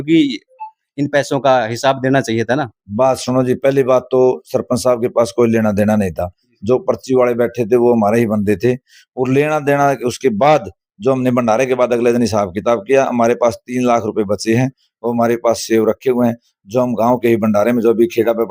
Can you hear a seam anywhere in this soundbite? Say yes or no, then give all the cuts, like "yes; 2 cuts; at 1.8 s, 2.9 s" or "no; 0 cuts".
no; 0 cuts